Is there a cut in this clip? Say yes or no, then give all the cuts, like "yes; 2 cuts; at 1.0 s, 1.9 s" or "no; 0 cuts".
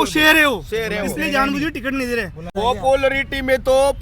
yes; 1 cut; at 2.4 s